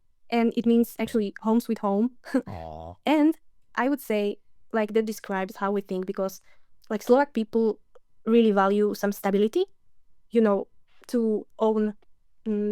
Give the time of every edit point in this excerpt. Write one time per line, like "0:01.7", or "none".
none